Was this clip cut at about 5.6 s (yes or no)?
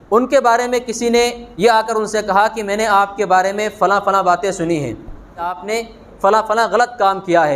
yes